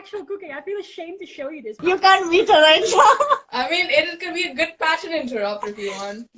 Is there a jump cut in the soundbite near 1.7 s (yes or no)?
yes